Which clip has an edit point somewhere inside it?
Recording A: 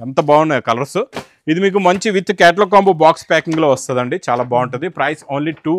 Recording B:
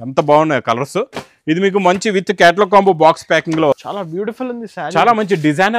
B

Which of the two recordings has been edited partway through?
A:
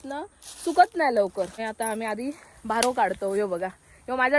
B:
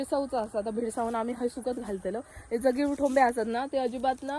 A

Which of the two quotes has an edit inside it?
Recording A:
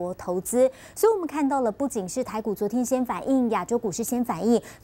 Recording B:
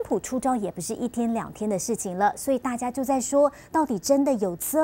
B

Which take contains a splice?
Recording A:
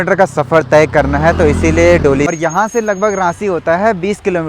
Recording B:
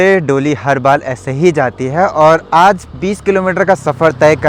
A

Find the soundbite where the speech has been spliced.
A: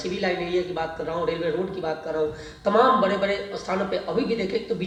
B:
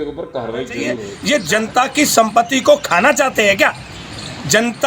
B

